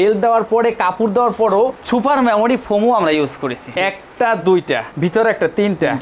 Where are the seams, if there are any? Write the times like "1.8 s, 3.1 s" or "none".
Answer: 3.6 s